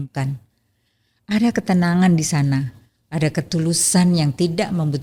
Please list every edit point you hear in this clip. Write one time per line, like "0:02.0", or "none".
none